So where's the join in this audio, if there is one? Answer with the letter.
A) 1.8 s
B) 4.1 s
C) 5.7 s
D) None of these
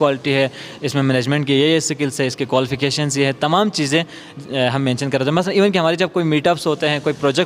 D